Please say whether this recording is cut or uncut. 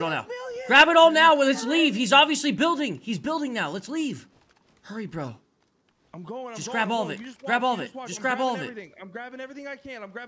uncut